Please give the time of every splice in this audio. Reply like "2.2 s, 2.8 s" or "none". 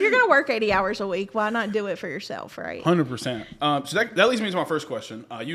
none